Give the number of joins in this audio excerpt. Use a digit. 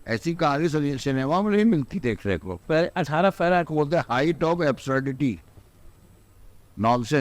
1